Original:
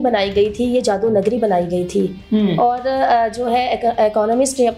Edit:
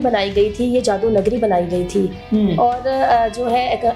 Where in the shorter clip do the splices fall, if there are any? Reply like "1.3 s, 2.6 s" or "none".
none